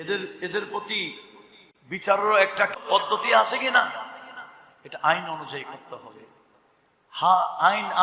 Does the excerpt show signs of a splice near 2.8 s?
yes; 1 cut; at 2.8 s

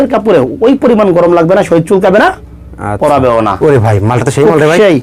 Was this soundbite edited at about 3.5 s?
yes; 1 cut; at 3.5 s

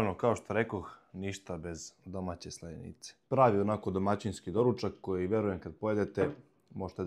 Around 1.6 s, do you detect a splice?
no; 1 cut; at 3.1 s

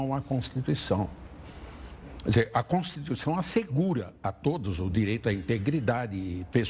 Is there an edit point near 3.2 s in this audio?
no; 1 cut; at 5.2 s

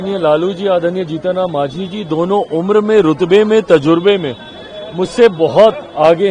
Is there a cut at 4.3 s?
no; 0 cuts

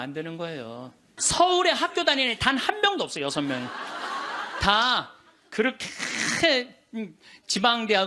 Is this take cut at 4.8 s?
no; 1 cut; at 1.1 s

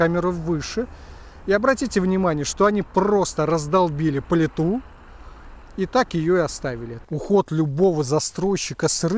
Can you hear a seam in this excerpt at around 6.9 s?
yes; 1 cut; at 6.9 s

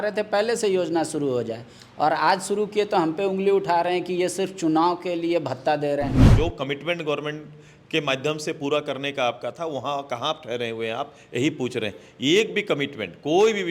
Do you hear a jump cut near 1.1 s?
no; 1 cut; at 6.3 s

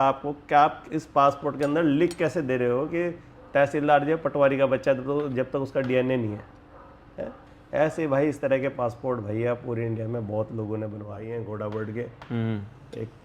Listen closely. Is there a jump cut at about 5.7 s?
no; 1 cut; at 11.1 s

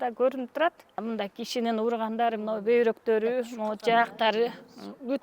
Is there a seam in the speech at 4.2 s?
no; 1 cut; at 1.0 s

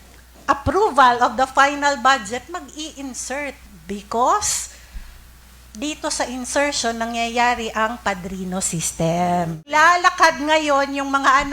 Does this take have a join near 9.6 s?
yes; 1 cut; at 9.6 s

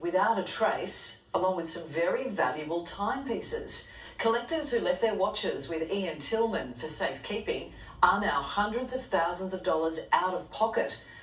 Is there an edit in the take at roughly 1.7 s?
no; 0 cuts

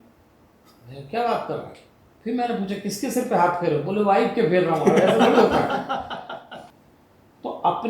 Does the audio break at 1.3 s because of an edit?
no; 1 cut; at 6.7 s

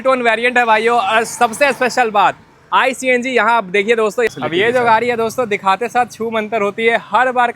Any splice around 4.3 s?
yes; 1 cut; at 4.3 s

